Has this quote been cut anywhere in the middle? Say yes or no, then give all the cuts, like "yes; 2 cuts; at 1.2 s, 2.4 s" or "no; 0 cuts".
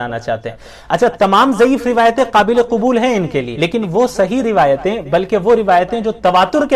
yes; 1 cut; at 3.5 s